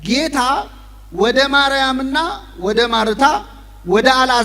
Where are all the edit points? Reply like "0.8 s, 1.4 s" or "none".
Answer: none

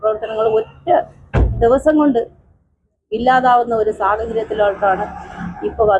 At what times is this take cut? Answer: none

